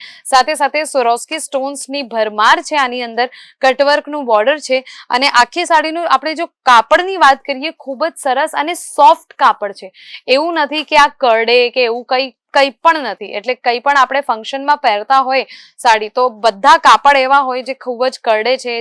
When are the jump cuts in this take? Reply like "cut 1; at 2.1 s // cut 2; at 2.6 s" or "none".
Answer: none